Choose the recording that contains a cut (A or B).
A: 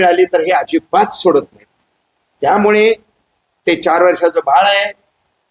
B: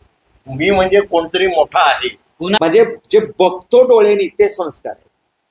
B